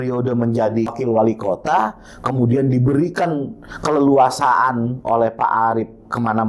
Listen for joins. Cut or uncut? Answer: cut